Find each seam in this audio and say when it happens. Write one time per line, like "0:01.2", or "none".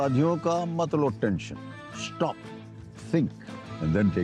none

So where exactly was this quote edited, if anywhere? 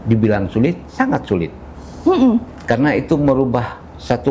none

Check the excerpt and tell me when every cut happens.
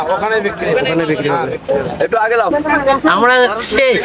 0:02.5

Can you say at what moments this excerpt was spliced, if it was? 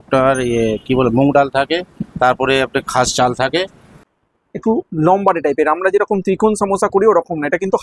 0:03.9

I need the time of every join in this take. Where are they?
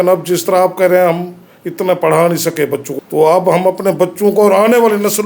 0:02.9

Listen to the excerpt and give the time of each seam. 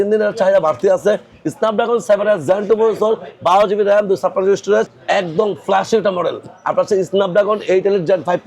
0:04.9

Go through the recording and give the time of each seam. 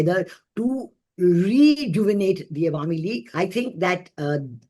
0:03.2

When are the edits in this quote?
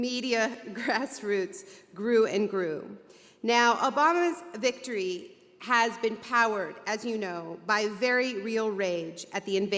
0:02.4

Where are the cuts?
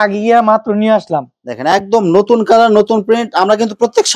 none

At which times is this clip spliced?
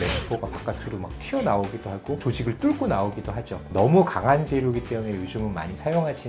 none

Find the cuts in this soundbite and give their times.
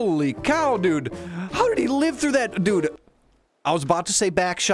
none

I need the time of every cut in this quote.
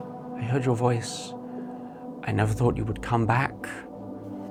none

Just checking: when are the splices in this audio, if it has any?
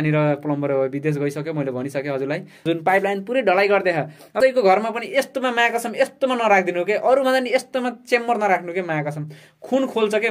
0:02.6
0:04.4

